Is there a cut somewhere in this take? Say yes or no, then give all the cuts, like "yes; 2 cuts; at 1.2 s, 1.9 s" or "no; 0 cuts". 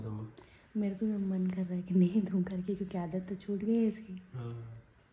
no; 0 cuts